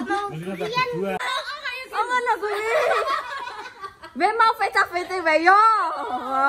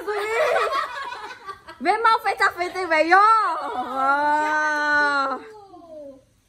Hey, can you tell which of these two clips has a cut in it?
first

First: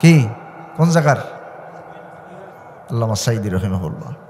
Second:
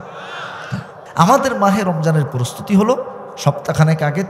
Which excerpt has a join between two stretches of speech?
second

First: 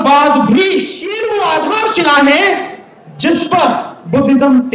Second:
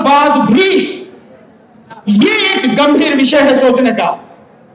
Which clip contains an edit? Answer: first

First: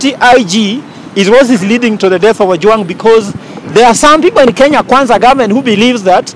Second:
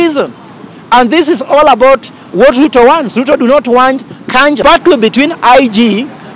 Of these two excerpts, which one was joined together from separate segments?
second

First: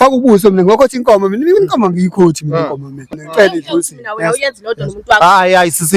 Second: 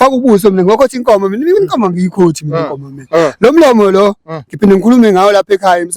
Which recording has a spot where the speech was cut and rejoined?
first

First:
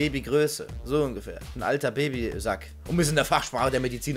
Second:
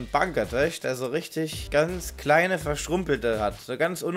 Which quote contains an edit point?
second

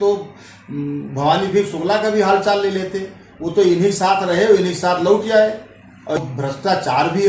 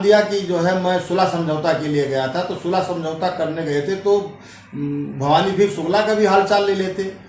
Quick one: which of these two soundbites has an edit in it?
first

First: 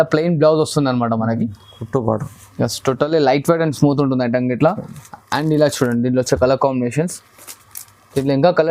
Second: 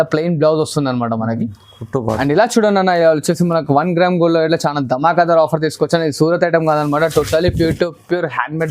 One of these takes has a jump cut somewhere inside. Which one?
second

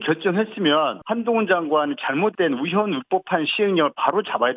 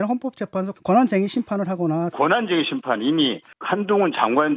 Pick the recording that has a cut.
second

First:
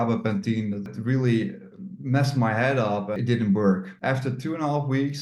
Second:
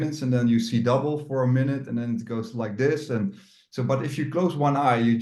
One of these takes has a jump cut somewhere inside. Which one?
first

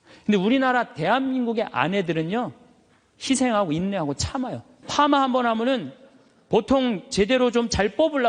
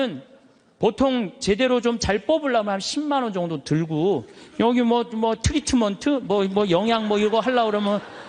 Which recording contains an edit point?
first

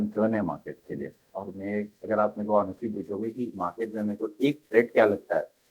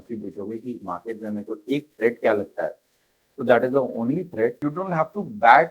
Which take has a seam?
second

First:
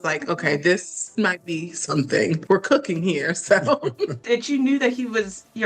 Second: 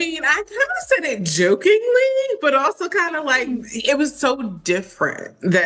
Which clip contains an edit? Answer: first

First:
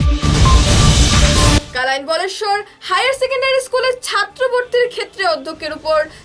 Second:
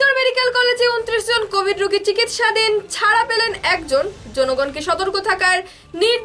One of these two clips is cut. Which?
first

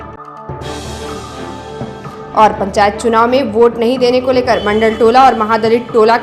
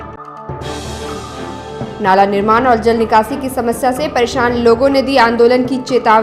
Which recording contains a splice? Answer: second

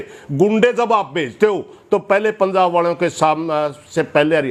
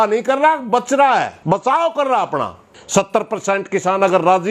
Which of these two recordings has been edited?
second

